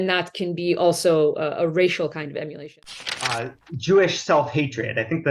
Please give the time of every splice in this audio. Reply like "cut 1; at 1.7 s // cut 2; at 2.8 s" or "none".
cut 1; at 2.7 s